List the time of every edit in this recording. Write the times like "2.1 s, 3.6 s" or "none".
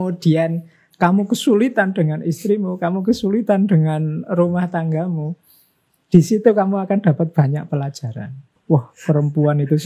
8.5 s